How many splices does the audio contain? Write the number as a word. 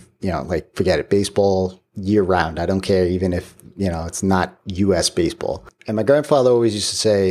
one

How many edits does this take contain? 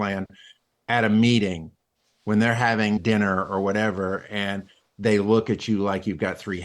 one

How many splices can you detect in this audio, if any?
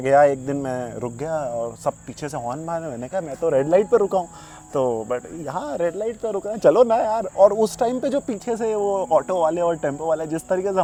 zero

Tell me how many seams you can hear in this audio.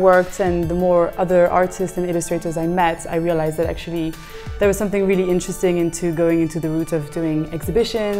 zero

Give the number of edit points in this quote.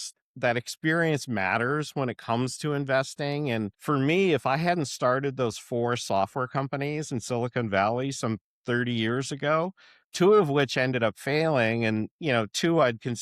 one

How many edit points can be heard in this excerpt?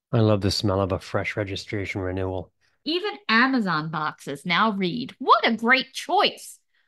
one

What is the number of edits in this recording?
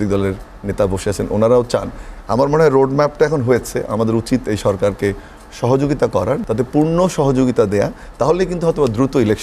one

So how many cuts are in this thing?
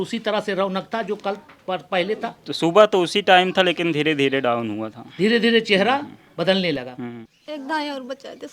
one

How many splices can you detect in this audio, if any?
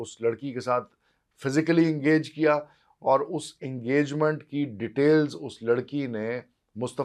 zero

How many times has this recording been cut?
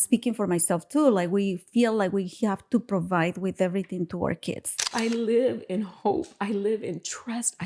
one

